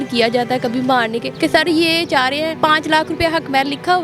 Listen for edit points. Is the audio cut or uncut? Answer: cut